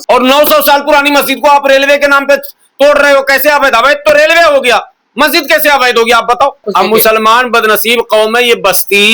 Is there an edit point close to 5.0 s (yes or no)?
no